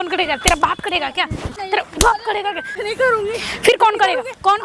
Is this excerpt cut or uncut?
cut